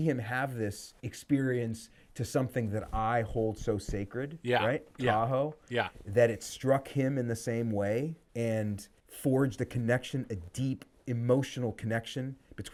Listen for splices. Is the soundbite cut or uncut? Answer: uncut